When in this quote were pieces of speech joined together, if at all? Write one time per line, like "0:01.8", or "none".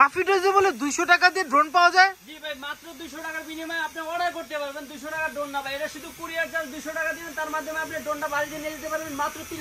none